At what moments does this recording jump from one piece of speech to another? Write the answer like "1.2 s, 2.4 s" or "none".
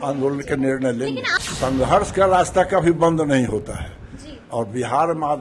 1.3 s